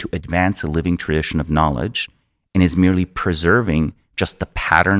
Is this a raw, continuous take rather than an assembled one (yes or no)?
yes